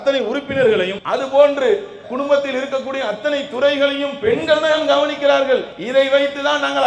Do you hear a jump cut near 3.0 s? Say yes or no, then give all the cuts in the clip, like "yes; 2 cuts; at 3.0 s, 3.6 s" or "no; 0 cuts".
no; 2 cuts; at 1.0 s, 5.8 s